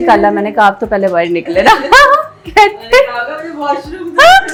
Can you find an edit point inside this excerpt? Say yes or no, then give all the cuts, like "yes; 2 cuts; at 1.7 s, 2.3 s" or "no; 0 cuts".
no; 0 cuts